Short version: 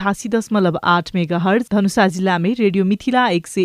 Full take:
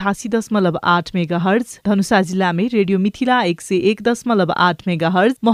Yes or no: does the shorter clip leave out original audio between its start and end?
yes